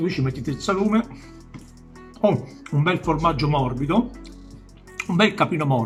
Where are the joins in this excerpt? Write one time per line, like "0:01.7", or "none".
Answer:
none